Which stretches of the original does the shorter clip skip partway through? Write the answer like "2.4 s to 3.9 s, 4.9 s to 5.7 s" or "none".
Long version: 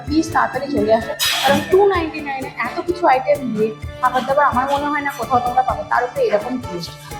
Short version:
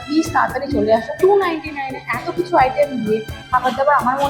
1.1 s to 1.6 s